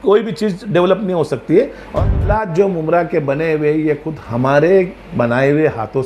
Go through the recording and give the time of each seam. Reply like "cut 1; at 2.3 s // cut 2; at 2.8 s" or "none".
cut 1; at 2.0 s